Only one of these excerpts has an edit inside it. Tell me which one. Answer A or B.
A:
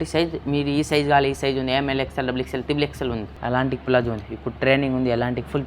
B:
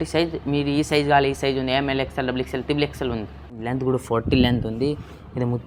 A